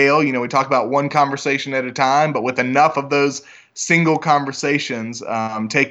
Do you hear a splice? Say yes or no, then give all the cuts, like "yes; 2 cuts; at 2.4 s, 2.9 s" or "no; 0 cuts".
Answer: no; 0 cuts